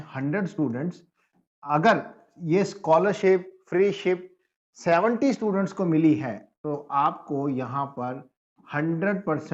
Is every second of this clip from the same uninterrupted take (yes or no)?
yes